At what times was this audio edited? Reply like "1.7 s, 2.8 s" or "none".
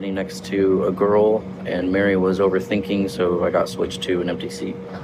none